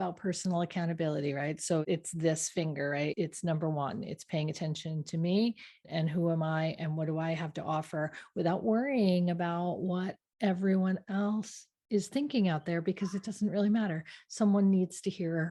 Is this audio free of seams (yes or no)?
no